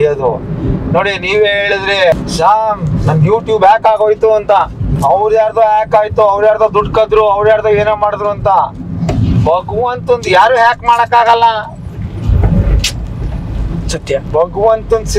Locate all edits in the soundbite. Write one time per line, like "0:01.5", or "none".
0:02.1
0:04.8